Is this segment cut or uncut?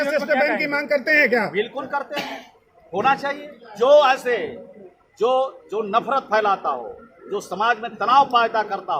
uncut